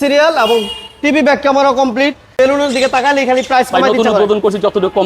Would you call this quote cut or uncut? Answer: cut